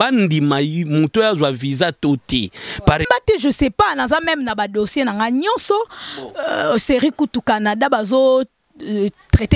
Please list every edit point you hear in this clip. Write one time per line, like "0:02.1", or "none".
0:03.1